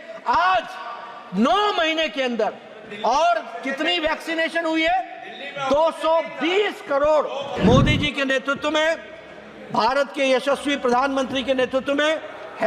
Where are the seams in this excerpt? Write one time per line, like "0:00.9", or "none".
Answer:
0:07.5